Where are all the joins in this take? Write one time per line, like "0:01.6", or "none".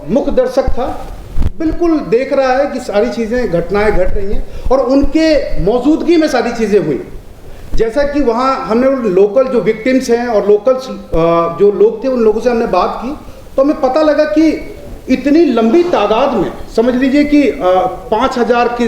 none